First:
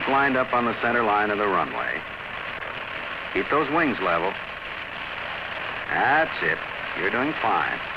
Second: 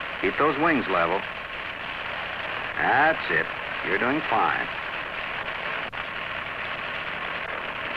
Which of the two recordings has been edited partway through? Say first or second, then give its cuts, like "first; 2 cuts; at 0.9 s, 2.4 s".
first; 1 cut; at 1.6 s